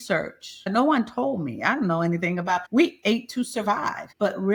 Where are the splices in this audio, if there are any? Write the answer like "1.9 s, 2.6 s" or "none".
none

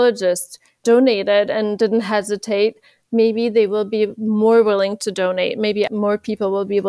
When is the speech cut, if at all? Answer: 5.9 s

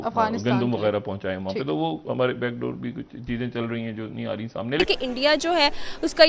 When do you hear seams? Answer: 4.8 s

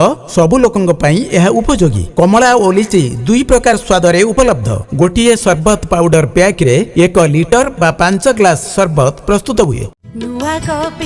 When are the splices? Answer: 9.9 s

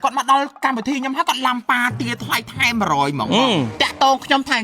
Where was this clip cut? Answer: 3.7 s

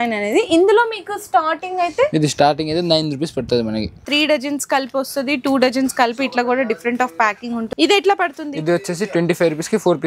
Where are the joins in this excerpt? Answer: 4.1 s, 7.7 s

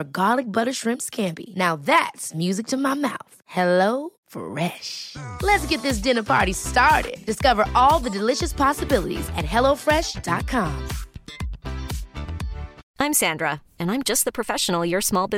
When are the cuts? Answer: 12.8 s

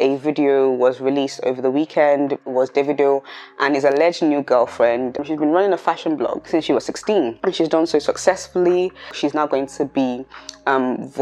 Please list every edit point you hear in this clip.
5.2 s, 9.1 s

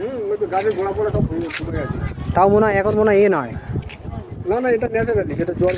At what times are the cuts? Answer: none

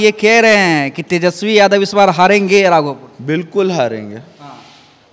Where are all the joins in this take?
none

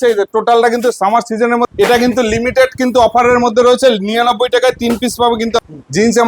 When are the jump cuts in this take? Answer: 1.7 s, 5.6 s

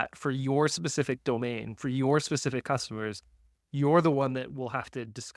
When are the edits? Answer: none

